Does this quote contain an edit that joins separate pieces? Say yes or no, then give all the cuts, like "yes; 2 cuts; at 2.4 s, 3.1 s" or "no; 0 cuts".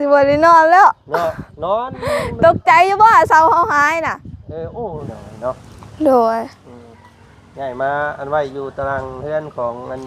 yes; 1 cut; at 5.1 s